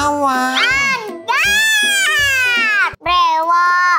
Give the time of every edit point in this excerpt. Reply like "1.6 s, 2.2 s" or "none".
3.0 s